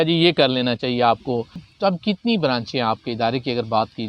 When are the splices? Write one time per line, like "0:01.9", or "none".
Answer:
0:01.6